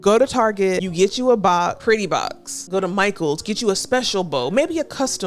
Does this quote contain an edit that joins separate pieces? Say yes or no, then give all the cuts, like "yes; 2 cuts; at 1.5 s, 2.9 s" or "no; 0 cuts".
yes; 2 cuts; at 0.9 s, 2.0 s